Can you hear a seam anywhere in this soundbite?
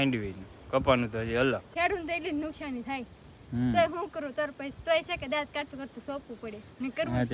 yes; 1 cut; at 1.7 s

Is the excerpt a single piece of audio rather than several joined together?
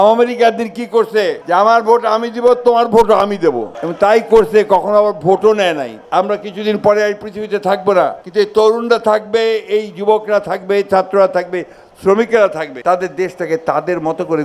no; 4 cuts; at 1.4 s, 6.0 s, 8.2 s, 12.7 s

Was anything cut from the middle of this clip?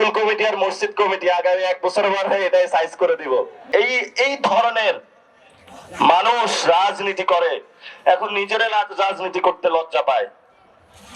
yes; 1 cut; at 3.6 s

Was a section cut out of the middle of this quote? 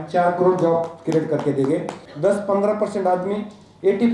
yes; 1 cut; at 2.0 s

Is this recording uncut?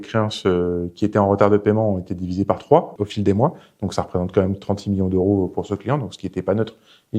yes; 0 cuts

